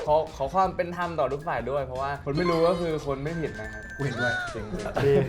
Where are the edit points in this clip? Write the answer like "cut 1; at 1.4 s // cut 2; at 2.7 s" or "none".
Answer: cut 1; at 3.9 s